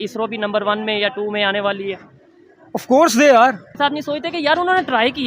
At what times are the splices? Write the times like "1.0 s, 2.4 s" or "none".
3.7 s